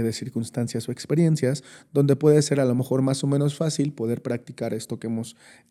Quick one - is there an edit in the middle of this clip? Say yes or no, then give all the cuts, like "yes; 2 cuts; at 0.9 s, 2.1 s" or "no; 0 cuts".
no; 0 cuts